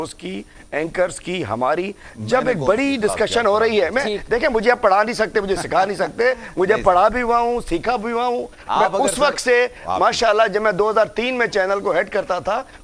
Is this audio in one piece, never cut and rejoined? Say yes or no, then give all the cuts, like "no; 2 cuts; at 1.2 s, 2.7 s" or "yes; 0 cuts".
yes; 0 cuts